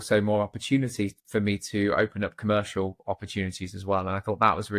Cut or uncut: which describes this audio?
uncut